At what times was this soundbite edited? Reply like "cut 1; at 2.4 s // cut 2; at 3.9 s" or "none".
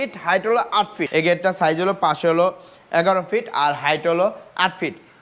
cut 1; at 1.0 s